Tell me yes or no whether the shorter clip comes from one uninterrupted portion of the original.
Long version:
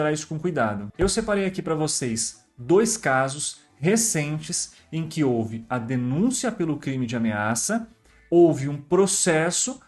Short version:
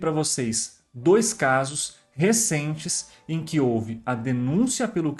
yes